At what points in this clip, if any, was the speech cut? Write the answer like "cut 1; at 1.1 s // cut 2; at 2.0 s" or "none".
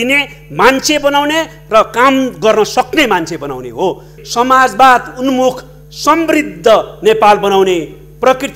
cut 1; at 4.2 s